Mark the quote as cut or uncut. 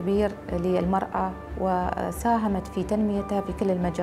uncut